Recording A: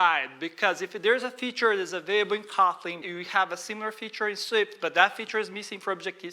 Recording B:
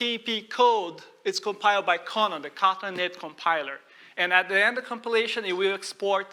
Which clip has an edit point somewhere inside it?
A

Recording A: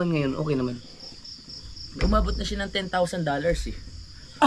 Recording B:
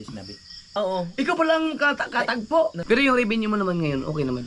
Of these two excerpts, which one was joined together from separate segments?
B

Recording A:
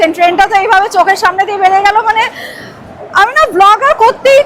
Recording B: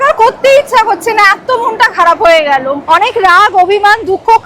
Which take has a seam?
B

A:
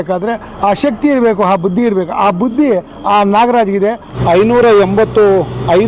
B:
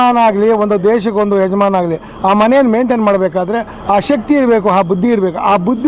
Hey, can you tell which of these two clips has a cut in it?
A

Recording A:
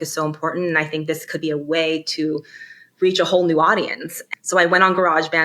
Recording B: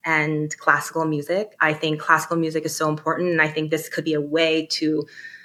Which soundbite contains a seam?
A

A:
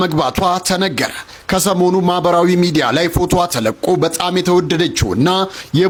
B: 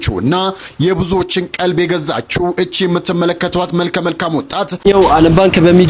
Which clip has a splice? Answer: B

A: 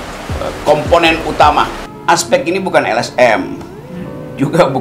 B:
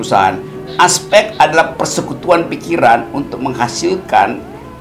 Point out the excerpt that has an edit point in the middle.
A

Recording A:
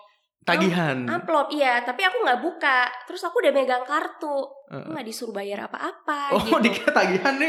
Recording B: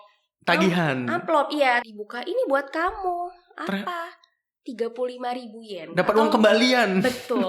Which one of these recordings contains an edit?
B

